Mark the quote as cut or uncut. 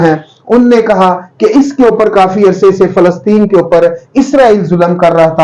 uncut